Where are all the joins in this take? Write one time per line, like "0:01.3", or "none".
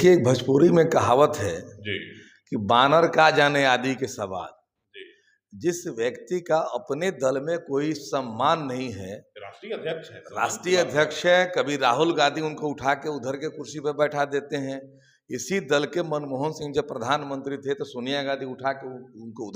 none